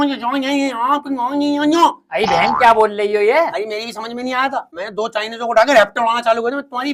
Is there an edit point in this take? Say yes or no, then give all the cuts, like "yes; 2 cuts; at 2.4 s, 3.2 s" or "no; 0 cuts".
no; 0 cuts